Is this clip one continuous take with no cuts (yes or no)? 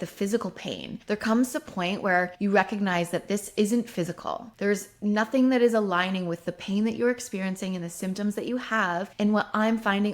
no